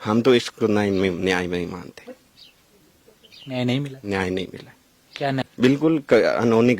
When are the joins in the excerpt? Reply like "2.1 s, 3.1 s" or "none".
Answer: 5.2 s